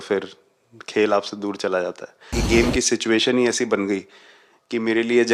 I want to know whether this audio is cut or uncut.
cut